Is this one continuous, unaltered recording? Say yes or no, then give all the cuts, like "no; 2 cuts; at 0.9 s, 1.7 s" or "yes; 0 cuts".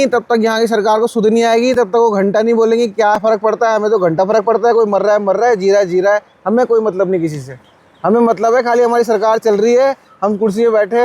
yes; 0 cuts